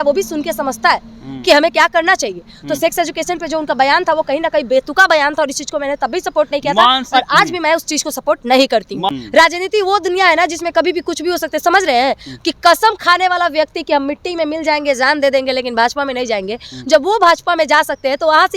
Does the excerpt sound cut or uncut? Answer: cut